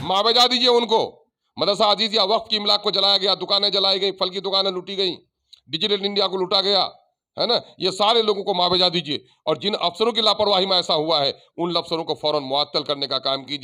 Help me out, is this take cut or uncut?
uncut